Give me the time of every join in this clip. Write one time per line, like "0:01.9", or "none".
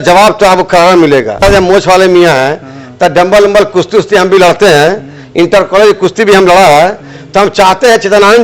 0:01.4